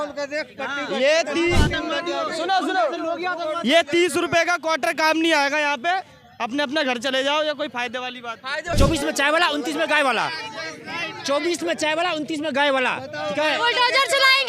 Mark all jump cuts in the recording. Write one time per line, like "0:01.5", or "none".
0:08.7

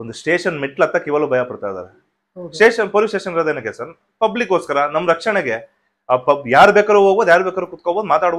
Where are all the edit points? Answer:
none

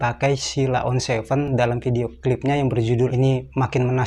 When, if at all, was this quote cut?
0:03.1

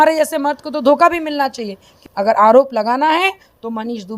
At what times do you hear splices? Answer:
0:01.9

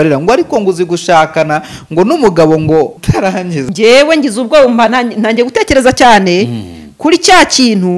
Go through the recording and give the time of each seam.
0:03.5

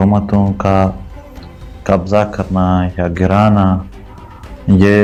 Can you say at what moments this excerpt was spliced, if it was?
none

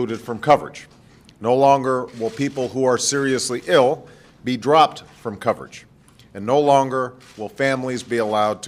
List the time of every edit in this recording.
none

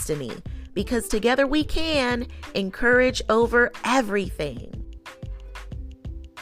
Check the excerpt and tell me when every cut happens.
0:04.7

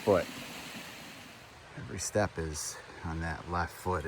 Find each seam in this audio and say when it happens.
0:01.2

